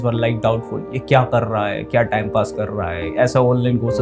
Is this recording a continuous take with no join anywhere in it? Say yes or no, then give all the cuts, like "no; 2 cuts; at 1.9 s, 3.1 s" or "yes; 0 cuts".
yes; 0 cuts